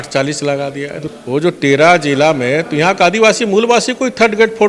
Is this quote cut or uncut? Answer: cut